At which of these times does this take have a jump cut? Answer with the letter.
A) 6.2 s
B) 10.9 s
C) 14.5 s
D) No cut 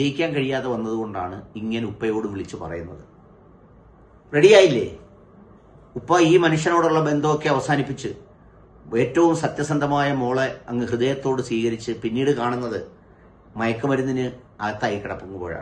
C